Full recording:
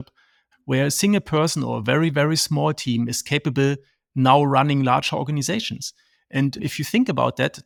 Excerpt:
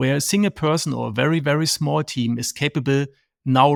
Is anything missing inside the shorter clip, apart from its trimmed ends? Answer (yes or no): no